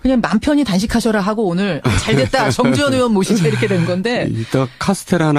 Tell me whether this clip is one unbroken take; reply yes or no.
yes